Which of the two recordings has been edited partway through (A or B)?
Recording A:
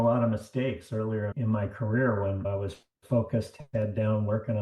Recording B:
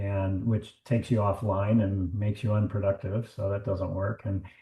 A